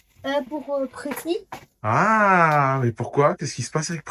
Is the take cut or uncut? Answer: uncut